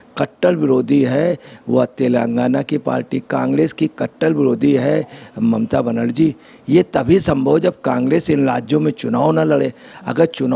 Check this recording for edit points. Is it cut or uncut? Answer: uncut